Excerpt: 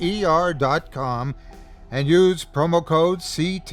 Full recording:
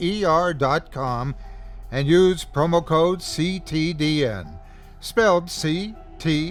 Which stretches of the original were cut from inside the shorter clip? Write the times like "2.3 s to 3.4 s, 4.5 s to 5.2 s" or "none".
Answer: none